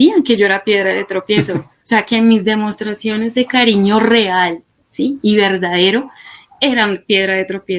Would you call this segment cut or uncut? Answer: uncut